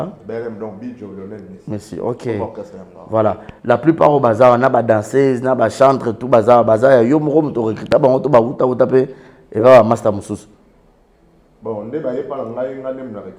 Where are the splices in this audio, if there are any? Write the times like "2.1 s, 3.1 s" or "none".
none